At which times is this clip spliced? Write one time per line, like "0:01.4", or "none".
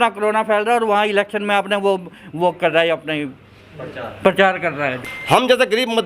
0:05.0